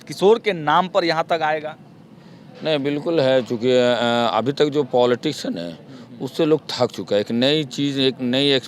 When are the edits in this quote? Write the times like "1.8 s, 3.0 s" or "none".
none